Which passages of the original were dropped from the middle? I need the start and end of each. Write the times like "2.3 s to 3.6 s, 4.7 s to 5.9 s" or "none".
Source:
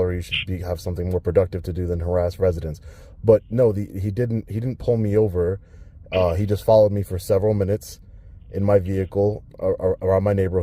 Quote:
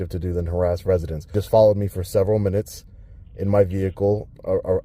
2.8 s to 6.4 s